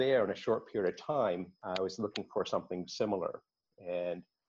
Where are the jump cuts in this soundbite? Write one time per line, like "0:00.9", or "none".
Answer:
none